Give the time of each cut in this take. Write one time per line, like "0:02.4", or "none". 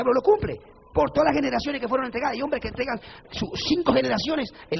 none